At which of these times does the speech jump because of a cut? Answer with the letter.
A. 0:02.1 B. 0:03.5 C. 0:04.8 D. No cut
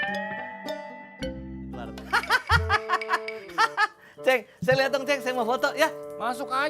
A